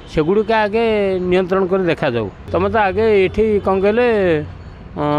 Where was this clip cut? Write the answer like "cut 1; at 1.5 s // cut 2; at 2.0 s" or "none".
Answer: cut 1; at 2.4 s